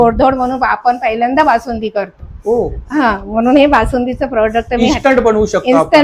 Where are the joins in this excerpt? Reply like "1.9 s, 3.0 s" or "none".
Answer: none